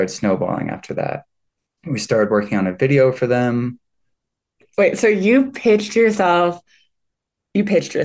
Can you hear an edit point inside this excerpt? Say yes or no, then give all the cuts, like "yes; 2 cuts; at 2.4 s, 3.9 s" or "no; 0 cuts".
yes; 1 cut; at 4.4 s